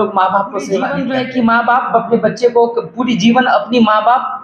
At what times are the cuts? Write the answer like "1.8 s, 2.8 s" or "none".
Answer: 1.0 s